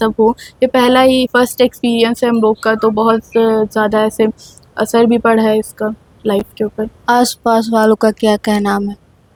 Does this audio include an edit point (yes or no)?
no